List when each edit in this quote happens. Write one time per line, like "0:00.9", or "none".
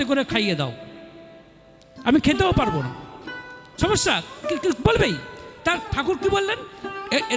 none